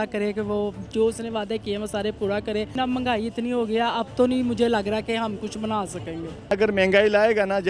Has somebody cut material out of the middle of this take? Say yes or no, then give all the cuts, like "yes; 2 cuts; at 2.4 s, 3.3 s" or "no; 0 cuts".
yes; 2 cuts; at 2.7 s, 6.5 s